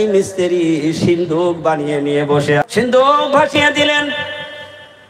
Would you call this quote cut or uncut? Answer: cut